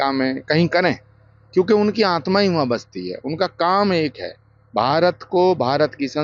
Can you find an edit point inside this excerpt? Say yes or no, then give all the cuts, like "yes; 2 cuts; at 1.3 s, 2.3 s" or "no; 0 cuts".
no; 0 cuts